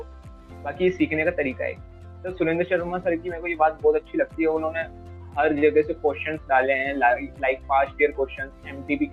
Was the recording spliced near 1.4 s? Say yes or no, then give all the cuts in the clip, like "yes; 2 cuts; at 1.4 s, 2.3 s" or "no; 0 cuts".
no; 0 cuts